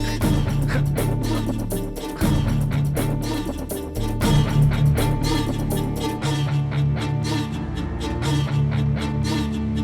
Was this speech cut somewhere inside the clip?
no; 0 cuts

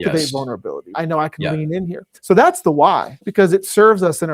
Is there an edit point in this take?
yes; 3 cuts; at 0.9 s, 2.2 s, 3.2 s

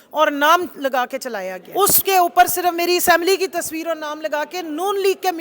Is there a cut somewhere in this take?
yes; 1 cut; at 1.6 s

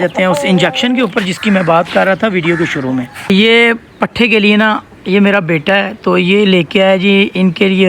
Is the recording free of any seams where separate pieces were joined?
no; 1 cut; at 3.2 s

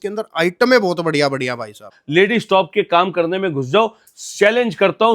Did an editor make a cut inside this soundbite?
yes; 1 cut; at 2.0 s

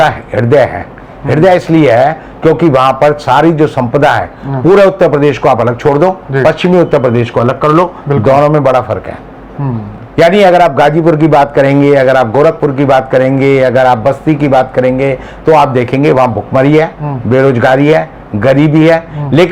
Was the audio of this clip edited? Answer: no; 0 cuts

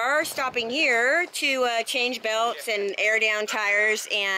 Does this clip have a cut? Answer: no; 0 cuts

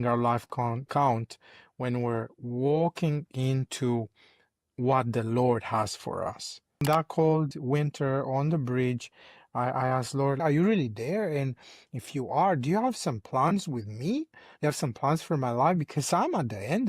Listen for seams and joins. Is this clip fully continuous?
no; 2 cuts; at 6.8 s, 10.4 s

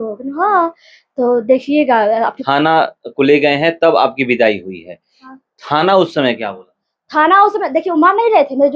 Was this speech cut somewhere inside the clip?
yes; 1 cut; at 2.4 s

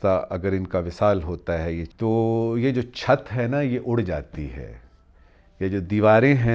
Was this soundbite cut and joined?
yes; 1 cut; at 1.8 s

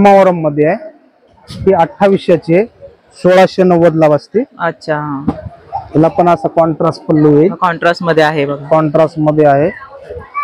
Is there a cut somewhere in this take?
no; 0 cuts

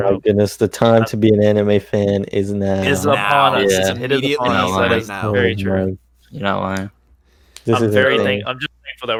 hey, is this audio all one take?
yes; 0 cuts

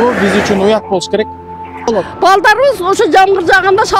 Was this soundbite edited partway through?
yes; 1 cut; at 1.9 s

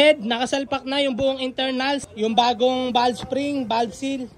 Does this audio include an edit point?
yes; 1 cut; at 2.1 s

